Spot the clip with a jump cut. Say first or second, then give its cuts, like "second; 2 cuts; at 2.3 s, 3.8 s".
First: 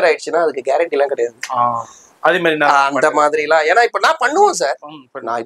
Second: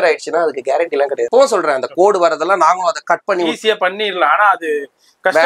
second; 1 cut; at 1.3 s